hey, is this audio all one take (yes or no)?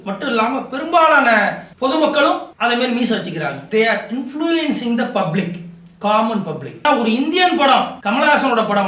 no